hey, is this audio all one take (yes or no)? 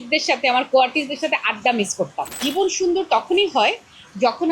no